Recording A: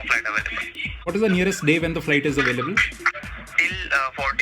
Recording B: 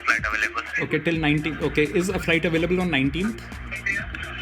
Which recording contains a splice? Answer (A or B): A